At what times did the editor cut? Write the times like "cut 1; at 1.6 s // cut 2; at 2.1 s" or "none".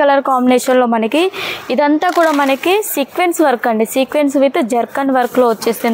none